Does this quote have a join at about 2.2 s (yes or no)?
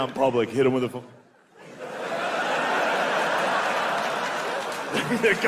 no